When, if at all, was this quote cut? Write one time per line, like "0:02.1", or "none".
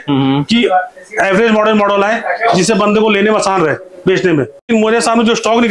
0:04.6